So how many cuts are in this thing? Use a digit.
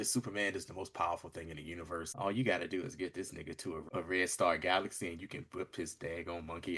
2